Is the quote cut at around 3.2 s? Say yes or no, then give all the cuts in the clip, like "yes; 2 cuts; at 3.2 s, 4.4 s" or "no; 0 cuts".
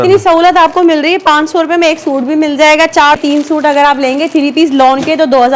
yes; 1 cut; at 3.2 s